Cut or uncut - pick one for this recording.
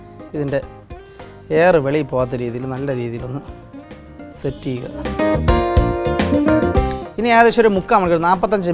cut